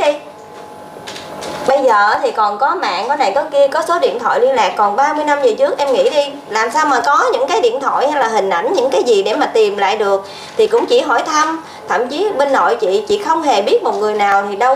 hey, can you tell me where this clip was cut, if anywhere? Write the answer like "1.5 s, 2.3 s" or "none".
none